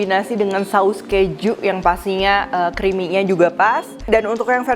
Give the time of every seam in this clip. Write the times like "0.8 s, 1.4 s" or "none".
none